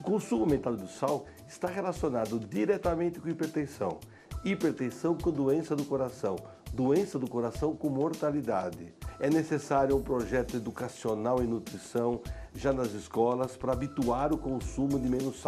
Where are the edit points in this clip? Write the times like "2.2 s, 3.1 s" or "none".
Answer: 8.9 s